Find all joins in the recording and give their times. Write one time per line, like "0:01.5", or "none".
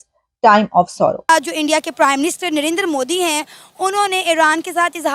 0:01.3